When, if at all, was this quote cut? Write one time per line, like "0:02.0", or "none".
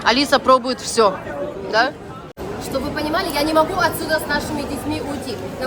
0:02.5

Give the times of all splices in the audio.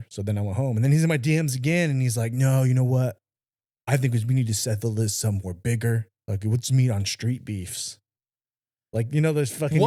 none

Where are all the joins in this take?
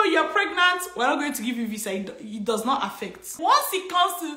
0:03.3

